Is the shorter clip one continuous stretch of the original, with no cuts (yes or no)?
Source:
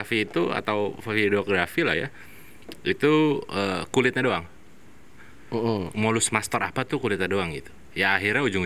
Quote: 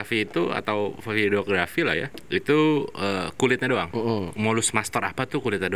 no